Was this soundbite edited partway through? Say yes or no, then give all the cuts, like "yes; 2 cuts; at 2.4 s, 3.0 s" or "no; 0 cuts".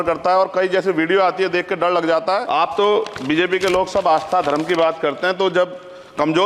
yes; 1 cut; at 2.4 s